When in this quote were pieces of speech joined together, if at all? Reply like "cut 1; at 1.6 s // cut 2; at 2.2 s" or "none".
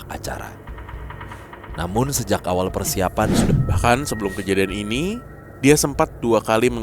cut 1; at 3.5 s